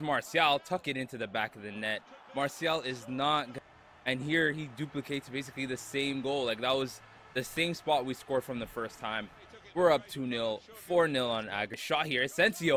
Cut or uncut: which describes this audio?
cut